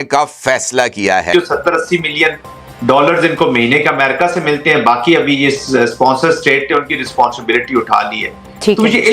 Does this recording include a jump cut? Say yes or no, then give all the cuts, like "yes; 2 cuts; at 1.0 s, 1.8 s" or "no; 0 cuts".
yes; 1 cut; at 1.3 s